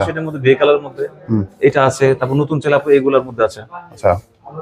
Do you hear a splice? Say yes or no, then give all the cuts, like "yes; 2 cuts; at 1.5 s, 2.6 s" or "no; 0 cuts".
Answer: no; 0 cuts